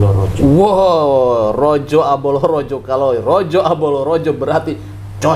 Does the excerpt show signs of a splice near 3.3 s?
no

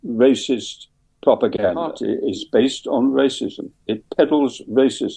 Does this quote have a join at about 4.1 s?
no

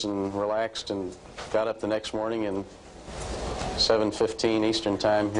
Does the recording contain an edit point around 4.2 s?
no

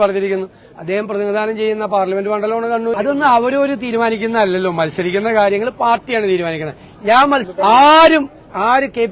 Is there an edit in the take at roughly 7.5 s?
yes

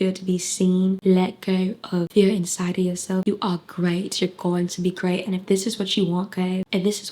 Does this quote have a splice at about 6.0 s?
no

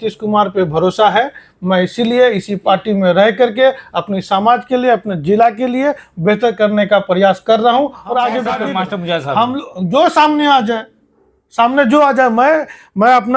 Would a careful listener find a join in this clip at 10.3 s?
no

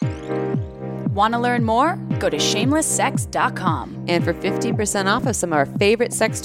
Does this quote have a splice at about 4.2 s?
no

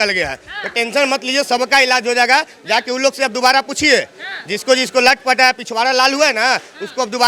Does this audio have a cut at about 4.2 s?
no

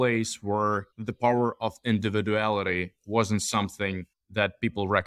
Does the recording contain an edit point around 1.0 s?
yes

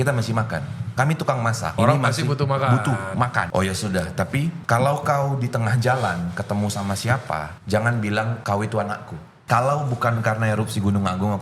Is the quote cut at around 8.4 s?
yes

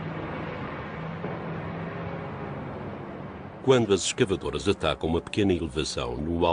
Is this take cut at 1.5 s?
no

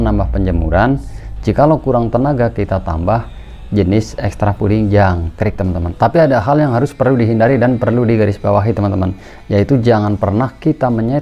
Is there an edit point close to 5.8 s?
yes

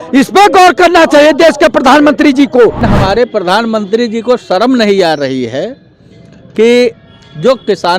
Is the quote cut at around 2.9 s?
yes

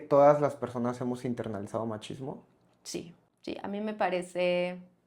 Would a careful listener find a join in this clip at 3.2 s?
yes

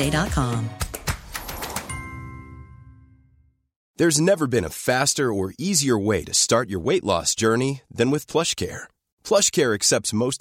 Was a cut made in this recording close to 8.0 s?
no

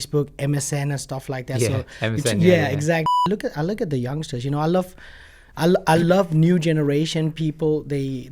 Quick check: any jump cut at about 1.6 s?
no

